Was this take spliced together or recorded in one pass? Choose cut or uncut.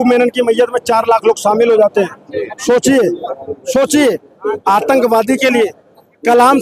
uncut